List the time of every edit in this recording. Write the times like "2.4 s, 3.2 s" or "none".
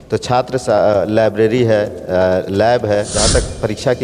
3.1 s